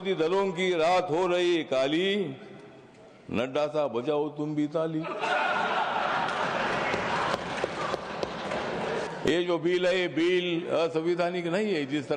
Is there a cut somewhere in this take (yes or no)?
yes